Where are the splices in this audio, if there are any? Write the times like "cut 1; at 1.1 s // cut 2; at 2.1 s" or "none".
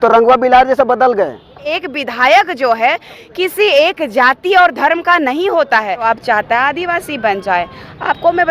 cut 1; at 1.8 s // cut 2; at 6.0 s